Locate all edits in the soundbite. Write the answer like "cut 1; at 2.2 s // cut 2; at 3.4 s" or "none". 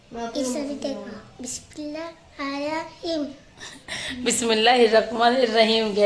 none